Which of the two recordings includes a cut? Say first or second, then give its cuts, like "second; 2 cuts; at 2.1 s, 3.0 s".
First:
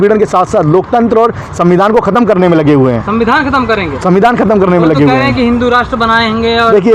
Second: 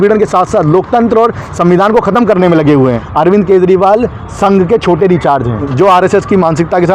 second; 2 cuts; at 3.0 s, 5.7 s